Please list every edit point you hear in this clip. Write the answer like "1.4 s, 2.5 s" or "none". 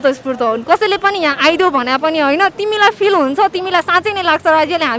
none